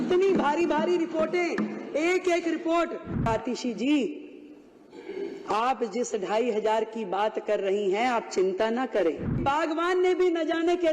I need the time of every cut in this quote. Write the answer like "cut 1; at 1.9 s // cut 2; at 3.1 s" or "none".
cut 1; at 3.3 s // cut 2; at 9.4 s